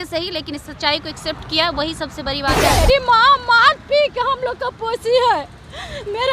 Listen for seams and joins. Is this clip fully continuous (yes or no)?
no